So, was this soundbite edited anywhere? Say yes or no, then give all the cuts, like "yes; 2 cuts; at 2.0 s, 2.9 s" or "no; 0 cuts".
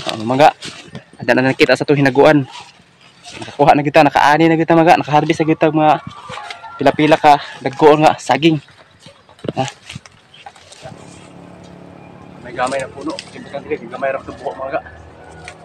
yes; 1 cut; at 10.9 s